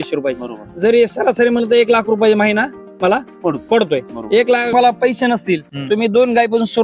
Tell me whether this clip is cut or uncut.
cut